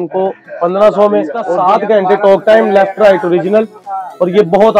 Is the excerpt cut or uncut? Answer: cut